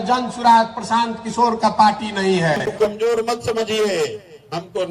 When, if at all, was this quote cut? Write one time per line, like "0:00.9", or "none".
0:02.7